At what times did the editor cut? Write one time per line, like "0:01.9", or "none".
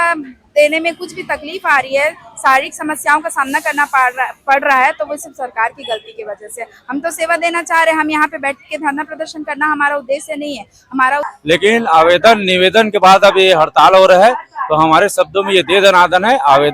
0:11.2